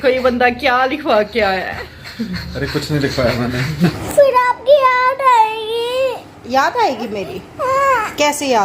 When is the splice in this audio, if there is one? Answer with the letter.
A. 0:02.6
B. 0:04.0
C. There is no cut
B